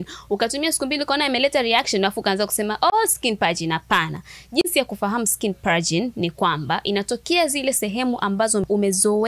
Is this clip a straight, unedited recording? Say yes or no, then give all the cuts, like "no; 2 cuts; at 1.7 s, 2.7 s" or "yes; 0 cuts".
yes; 0 cuts